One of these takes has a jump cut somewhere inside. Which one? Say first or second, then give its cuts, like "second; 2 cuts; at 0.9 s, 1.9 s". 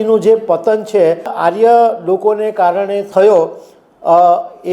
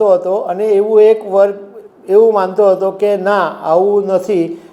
first; 2 cuts; at 1.3 s, 3.0 s